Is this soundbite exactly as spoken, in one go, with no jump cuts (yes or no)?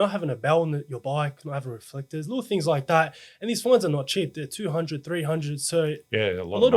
yes